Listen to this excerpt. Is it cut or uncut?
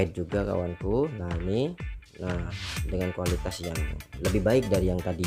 uncut